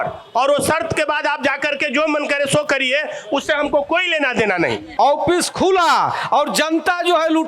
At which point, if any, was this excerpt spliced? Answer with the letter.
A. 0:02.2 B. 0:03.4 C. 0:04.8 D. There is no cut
C